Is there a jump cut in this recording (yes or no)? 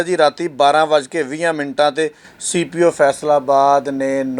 no